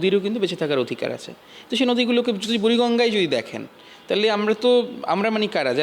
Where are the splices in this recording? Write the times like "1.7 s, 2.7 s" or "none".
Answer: none